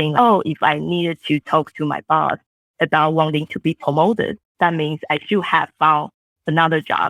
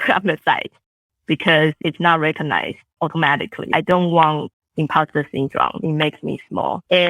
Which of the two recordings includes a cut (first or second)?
second